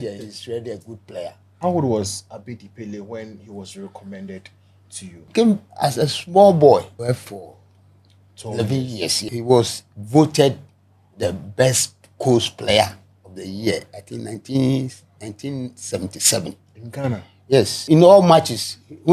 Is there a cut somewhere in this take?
yes; 5 cuts; at 1.4 s, 5.3 s, 6.9 s, 9.3 s, 17.8 s

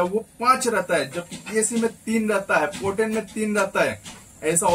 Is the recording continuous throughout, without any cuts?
yes; 0 cuts

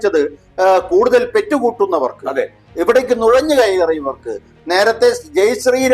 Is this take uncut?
no; 1 cut; at 4.5 s

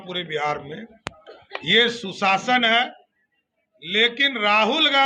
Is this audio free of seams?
yes; 0 cuts

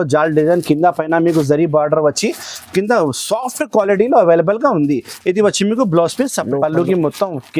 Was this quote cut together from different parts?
yes; 1 cut; at 6.4 s

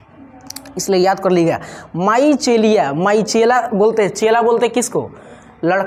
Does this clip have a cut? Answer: no; 0 cuts

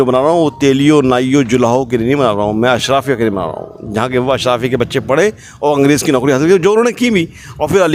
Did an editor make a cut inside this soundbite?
no; 0 cuts

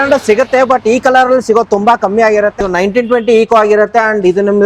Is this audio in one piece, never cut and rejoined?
no; 1 cut; at 2.5 s

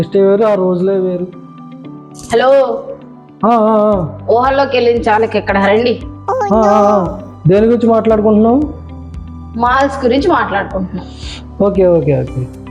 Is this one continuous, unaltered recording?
yes; 0 cuts

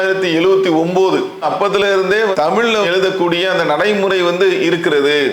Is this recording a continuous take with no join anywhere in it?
yes; 0 cuts

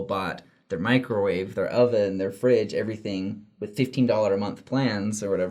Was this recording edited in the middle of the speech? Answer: no; 0 cuts

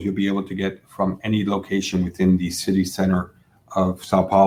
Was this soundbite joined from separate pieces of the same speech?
no; 0 cuts

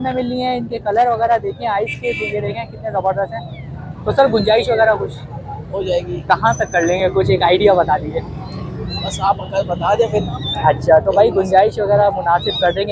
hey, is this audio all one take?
yes; 0 cuts

